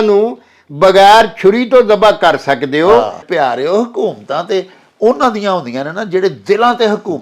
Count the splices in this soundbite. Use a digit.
1